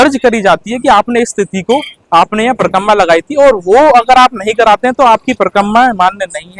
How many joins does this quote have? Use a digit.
0